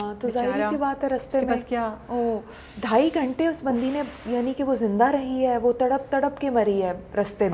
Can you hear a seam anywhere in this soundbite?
no; 0 cuts

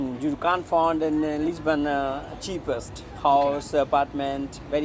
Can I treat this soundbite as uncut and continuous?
yes; 0 cuts

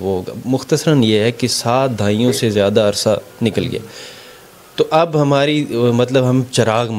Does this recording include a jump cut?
no; 0 cuts

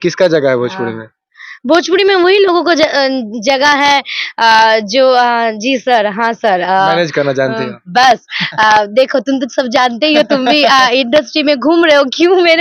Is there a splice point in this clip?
no; 0 cuts

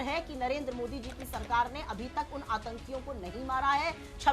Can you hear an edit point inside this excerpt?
no; 0 cuts

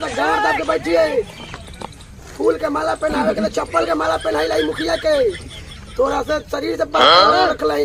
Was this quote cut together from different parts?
no; 0 cuts

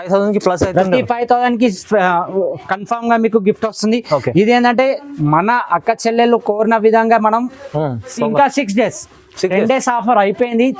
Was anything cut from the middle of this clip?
no; 0 cuts

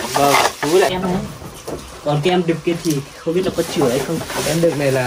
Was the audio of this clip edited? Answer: yes; 1 cut; at 0.9 s

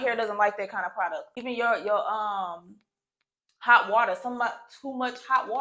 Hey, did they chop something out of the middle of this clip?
yes; 1 cut; at 1.2 s

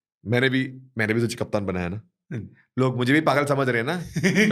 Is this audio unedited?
yes; 0 cuts

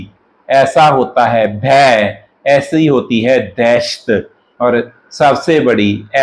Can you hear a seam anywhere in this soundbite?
no; 0 cuts

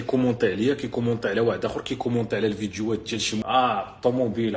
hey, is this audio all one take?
no; 1 cut; at 3.4 s

